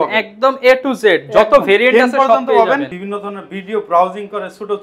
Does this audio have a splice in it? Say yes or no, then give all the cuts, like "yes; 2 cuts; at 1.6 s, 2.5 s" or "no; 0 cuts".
yes; 1 cut; at 2.9 s